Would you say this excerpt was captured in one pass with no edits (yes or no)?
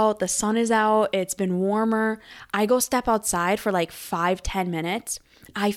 yes